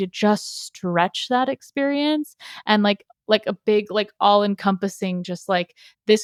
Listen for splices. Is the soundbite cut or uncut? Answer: uncut